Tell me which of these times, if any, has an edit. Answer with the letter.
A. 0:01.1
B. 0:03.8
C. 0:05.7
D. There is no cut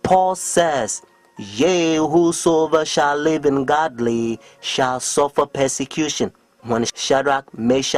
B